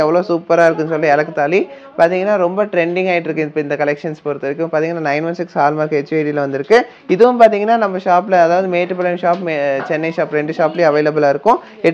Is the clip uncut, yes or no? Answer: yes